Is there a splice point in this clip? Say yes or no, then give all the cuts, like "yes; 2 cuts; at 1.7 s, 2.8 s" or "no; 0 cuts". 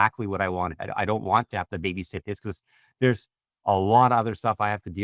no; 0 cuts